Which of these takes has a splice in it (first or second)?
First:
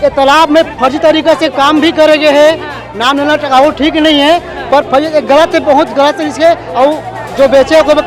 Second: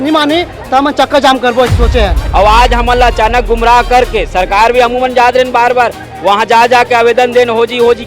second